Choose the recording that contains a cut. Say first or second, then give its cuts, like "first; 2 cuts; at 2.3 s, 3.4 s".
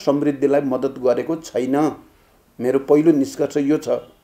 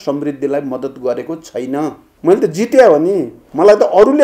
second; 1 cut; at 2.1 s